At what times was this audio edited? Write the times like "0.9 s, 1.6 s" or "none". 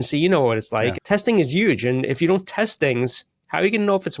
1.0 s